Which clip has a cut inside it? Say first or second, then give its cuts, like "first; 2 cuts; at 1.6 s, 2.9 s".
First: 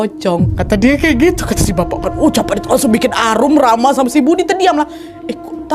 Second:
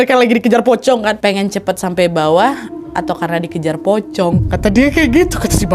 second; 1 cut; at 1.2 s